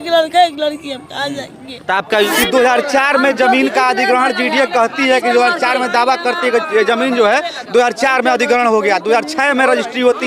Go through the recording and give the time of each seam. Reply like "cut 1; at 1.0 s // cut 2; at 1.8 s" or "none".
cut 1; at 2.3 s